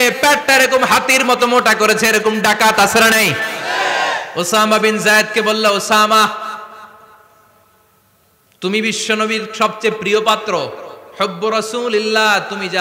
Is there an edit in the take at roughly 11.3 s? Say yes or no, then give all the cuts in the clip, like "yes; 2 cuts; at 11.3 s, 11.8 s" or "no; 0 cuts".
no; 1 cut; at 4.2 s